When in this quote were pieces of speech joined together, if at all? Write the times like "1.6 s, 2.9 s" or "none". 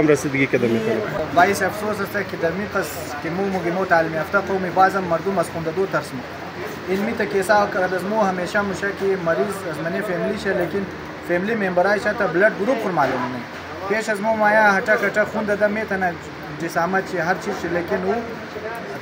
1.2 s